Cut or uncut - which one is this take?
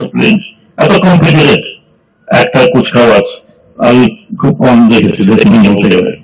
uncut